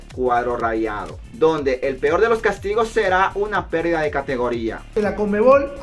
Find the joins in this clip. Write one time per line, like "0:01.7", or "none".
0:04.9